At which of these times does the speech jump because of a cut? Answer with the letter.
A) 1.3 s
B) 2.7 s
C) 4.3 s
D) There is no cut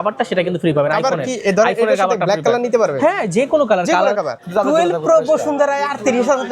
C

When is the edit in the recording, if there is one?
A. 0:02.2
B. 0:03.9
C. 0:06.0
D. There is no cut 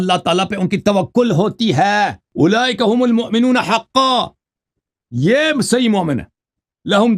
A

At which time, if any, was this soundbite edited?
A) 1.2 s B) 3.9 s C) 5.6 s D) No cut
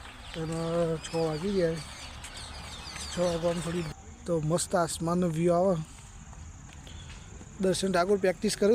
B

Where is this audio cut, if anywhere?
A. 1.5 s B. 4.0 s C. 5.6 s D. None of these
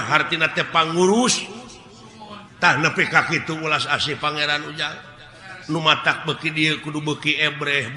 D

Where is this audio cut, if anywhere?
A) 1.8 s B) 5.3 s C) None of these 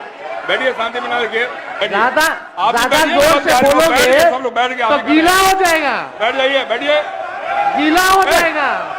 A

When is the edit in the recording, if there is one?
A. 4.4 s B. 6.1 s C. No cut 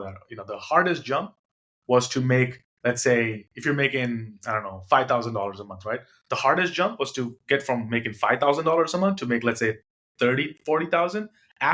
C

